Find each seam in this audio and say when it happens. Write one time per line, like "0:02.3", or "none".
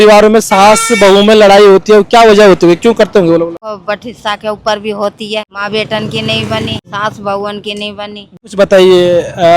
0:03.8
0:05.5
0:06.9
0:08.3